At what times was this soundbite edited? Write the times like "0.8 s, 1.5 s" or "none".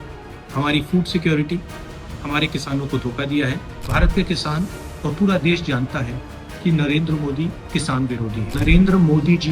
3.7 s, 8.4 s